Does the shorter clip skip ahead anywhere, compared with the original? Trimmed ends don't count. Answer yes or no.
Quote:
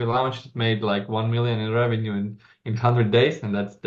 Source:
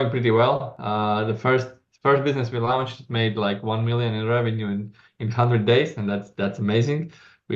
no